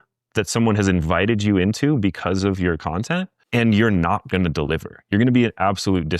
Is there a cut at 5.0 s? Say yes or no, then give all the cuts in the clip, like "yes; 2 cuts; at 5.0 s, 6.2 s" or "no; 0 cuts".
no; 1 cut; at 3.4 s